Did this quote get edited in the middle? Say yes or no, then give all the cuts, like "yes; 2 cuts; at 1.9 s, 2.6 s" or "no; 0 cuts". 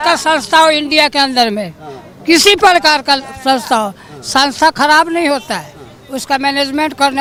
no; 0 cuts